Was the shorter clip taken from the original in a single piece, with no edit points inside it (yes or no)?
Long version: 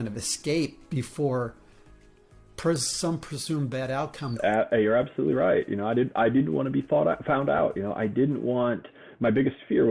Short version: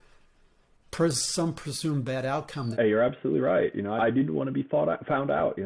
no